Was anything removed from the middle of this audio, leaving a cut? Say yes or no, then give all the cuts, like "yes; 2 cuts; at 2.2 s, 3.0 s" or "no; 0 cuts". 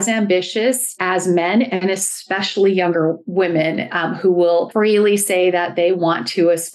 yes; 2 cuts; at 0.9 s, 4.7 s